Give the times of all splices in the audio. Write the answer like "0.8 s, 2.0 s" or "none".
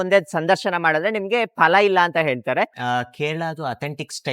2.8 s